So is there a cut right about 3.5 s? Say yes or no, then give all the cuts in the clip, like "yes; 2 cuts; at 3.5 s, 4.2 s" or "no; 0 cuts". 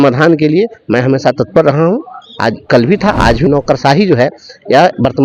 yes; 1 cut; at 3.5 s